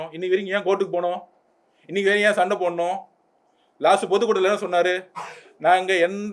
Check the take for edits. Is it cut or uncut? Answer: uncut